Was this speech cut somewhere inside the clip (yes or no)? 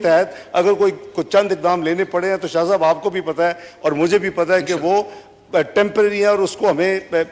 no